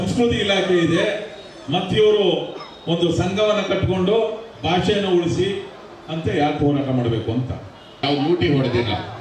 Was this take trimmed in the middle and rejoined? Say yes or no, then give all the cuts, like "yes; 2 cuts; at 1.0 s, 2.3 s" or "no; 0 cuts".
yes; 1 cut; at 7.9 s